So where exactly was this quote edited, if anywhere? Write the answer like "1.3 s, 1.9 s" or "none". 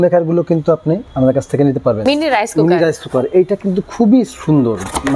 1.1 s, 2.0 s